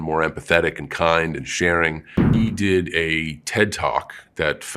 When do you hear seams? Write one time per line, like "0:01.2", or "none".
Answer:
0:02.3

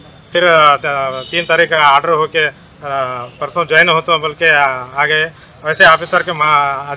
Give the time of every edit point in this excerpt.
none

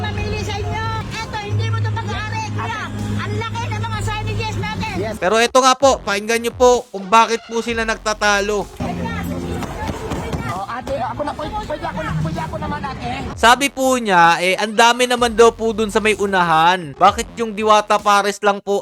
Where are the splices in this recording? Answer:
0:01.0
0:05.2
0:13.3

